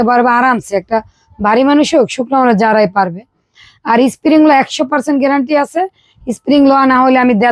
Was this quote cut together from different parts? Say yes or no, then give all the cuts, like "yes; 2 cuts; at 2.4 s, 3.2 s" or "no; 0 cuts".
no; 0 cuts